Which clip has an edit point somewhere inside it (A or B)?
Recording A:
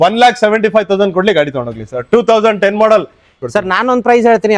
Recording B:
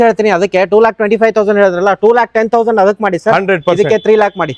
A